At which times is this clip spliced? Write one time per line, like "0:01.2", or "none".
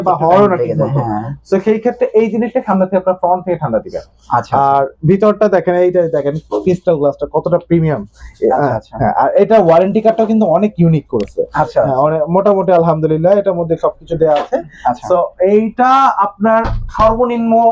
none